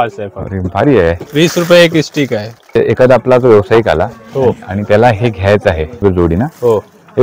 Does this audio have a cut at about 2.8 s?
yes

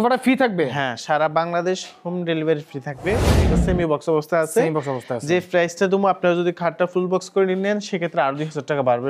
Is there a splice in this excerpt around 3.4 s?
yes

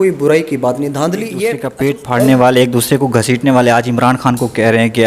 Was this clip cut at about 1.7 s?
yes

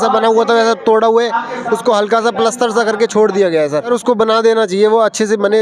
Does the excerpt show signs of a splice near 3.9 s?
yes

